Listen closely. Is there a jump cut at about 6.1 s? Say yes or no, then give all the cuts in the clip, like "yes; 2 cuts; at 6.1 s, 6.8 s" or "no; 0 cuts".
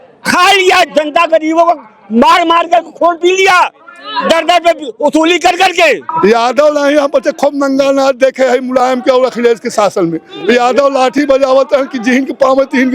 yes; 1 cut; at 6.1 s